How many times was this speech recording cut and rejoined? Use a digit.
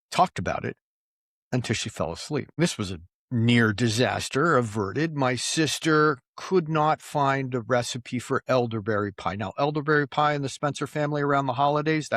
1